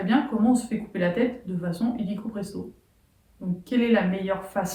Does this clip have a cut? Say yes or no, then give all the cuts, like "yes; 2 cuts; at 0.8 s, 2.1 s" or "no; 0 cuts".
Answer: no; 0 cuts